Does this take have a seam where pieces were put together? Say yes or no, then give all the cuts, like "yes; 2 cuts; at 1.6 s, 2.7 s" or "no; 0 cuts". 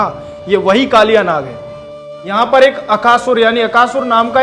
yes; 1 cut; at 1.9 s